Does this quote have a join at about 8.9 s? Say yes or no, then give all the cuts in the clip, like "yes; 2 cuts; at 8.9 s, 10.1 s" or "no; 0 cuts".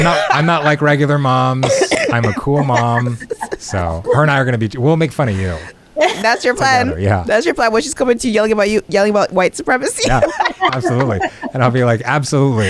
yes; 1 cut; at 8.9 s